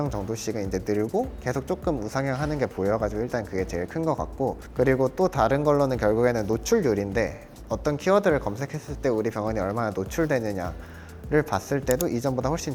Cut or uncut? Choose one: uncut